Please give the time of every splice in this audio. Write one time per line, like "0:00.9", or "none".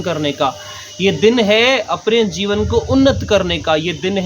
none